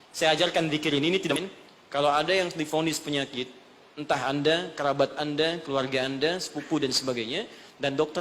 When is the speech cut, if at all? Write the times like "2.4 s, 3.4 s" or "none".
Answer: 1.3 s